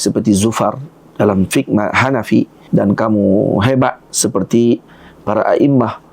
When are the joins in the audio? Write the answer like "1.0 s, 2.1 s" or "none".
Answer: 2.6 s